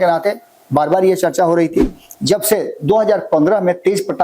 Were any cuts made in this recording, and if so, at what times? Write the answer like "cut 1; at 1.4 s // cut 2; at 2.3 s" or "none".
cut 1; at 2.0 s